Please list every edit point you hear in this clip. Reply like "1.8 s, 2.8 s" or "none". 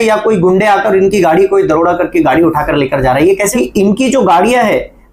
3.5 s